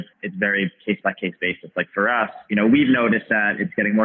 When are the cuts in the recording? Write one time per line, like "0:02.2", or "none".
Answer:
0:02.4